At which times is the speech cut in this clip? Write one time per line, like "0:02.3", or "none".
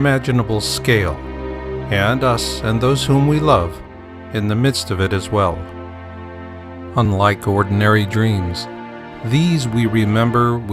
0:05.5